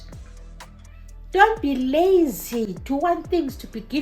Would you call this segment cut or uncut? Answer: uncut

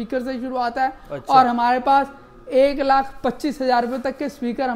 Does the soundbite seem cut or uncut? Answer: uncut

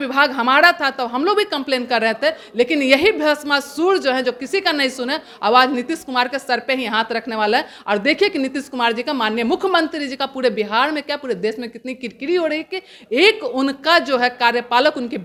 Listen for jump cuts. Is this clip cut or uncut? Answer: uncut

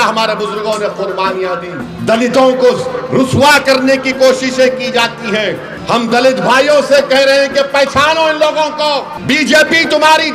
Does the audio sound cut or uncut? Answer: cut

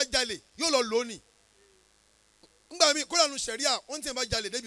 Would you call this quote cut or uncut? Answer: uncut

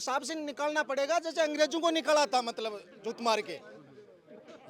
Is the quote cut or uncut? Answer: uncut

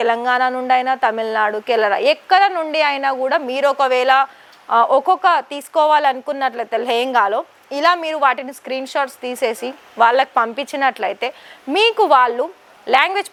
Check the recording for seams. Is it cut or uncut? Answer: uncut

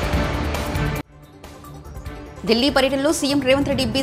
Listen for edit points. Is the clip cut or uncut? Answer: cut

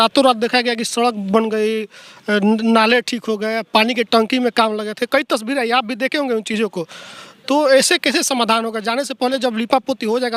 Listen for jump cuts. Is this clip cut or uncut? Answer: uncut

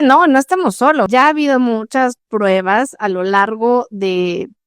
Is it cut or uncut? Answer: cut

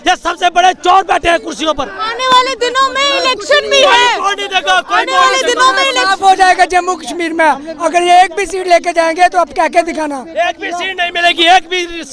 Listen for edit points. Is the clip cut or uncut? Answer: uncut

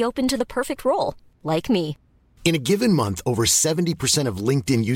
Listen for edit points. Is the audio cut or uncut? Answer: uncut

